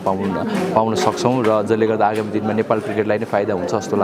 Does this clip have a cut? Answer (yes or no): no